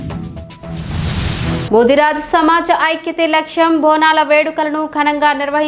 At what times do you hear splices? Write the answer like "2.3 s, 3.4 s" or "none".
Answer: 1.7 s

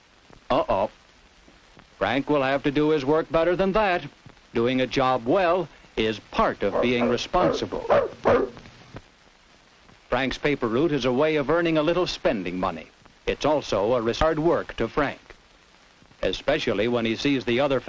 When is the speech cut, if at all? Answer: none

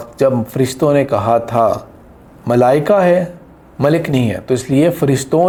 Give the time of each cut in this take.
none

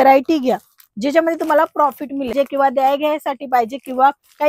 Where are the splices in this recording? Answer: 2.3 s

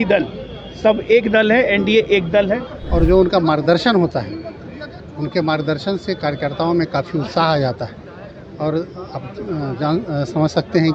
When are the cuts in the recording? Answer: 2.8 s

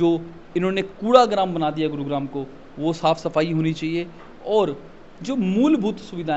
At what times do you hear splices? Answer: none

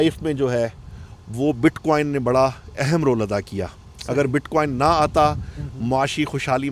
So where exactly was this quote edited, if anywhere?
none

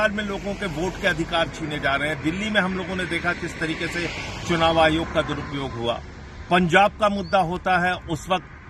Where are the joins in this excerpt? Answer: none

